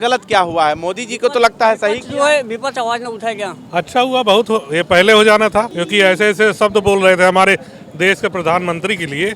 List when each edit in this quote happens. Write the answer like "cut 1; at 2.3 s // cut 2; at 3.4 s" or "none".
cut 1; at 3.5 s // cut 2; at 5.8 s

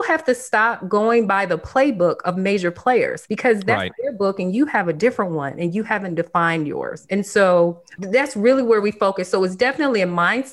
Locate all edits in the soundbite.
none

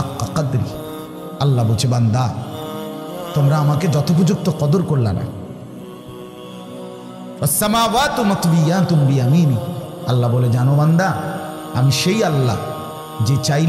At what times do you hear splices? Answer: cut 1; at 5.3 s // cut 2; at 7.4 s

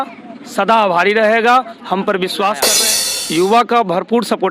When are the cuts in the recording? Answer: cut 1; at 2.7 s

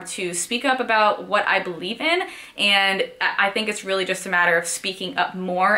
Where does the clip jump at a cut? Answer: none

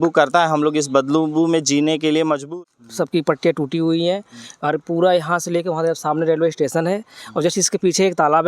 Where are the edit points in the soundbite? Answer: cut 1; at 2.5 s

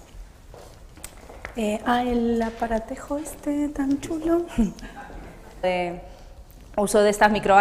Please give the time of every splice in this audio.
none

